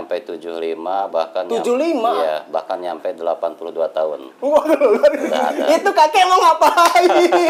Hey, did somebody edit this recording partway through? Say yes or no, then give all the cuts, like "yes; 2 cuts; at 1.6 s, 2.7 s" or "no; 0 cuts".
no; 0 cuts